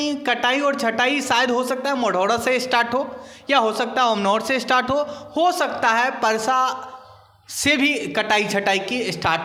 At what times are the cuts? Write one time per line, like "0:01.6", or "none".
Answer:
none